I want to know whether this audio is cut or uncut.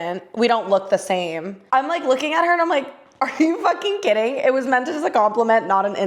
cut